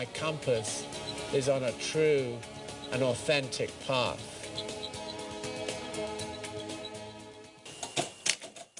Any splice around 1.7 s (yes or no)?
no